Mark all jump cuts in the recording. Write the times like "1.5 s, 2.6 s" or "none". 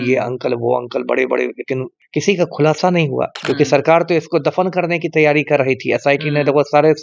3.3 s